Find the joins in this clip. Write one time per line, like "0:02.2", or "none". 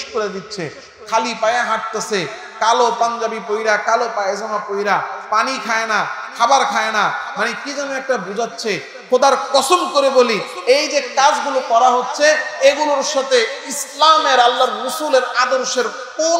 none